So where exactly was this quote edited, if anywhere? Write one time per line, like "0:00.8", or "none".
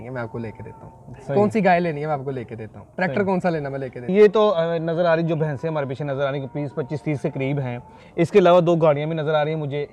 0:04.0